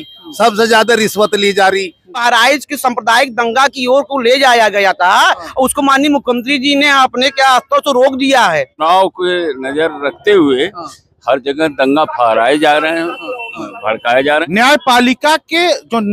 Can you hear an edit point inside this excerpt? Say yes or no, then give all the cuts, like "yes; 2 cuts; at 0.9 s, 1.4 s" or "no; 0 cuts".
yes; 3 cuts; at 2.1 s, 8.8 s, 14.4 s